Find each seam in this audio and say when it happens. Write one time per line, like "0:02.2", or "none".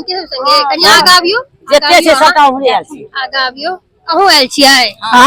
none